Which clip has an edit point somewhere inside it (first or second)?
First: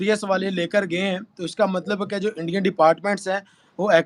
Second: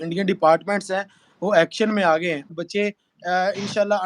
second